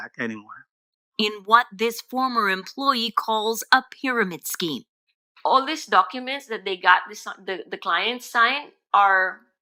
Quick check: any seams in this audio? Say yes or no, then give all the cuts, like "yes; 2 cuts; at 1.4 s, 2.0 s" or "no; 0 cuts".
no; 0 cuts